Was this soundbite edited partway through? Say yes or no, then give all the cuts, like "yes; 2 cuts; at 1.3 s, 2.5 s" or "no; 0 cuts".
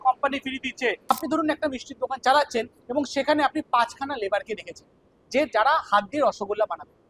yes; 1 cut; at 1.1 s